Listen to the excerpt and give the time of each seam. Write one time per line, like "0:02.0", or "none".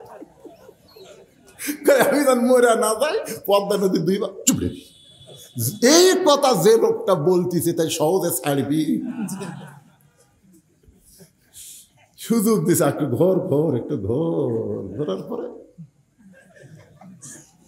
none